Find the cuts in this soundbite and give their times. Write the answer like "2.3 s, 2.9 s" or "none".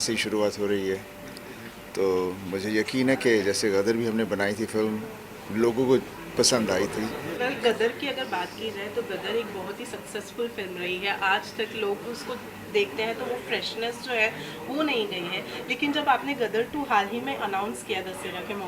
7.2 s